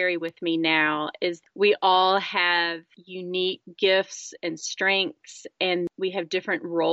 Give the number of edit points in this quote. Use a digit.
2